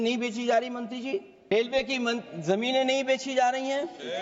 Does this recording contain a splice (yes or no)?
yes